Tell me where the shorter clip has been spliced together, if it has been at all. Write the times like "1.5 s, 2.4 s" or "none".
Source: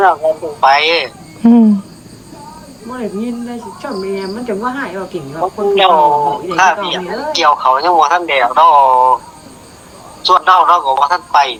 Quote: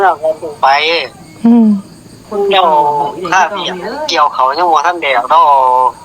2.3 s